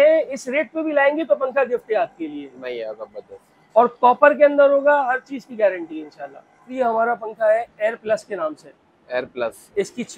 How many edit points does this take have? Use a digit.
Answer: 0